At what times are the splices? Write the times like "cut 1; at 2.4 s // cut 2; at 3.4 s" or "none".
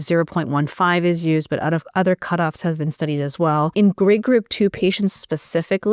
cut 1; at 3.7 s

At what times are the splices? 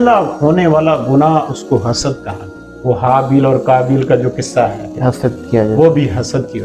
cut 1; at 2.7 s

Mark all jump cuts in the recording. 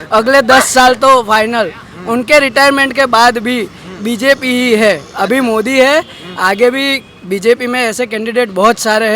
none

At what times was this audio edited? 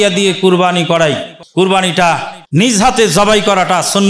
cut 1; at 1.3 s // cut 2; at 2.7 s

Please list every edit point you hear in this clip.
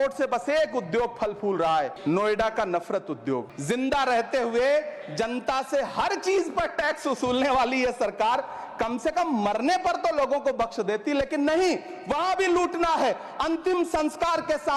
cut 1; at 3.5 s

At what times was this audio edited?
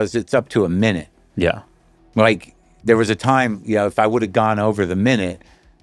none

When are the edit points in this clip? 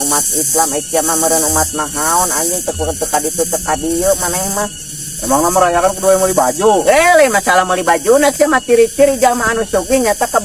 none

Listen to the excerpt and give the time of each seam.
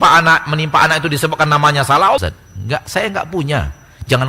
cut 1; at 2.2 s

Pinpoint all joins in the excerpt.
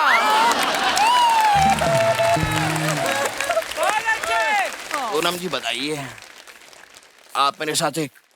cut 1; at 4.8 s

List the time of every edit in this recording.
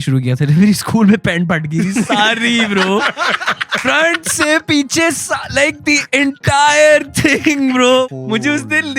cut 1; at 8.1 s

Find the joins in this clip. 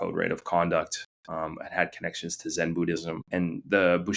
cut 1; at 3.2 s

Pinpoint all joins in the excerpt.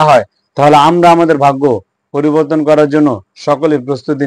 none

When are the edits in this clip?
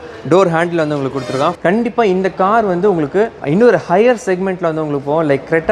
cut 1; at 1.6 s // cut 2; at 3.4 s

